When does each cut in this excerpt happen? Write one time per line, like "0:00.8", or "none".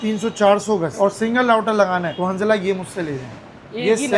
none